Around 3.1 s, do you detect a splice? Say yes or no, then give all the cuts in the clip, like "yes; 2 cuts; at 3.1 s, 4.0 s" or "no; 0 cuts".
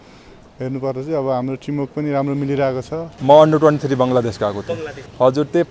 yes; 1 cut; at 3.1 s